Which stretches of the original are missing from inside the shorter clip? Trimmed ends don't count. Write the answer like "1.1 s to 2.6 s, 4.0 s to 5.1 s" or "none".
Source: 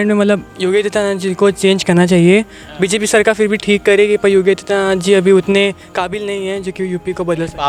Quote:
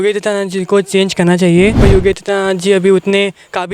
2.5 s to 4.2 s